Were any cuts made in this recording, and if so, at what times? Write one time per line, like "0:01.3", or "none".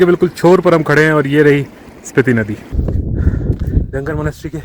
0:02.7